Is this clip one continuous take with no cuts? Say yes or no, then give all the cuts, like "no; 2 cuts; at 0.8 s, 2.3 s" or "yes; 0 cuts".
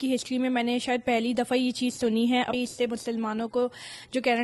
no; 1 cut; at 2.6 s